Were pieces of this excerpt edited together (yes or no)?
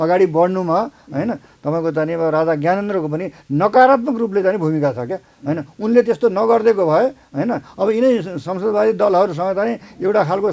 no